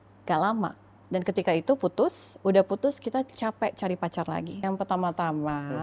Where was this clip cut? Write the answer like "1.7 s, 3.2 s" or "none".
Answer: 4.6 s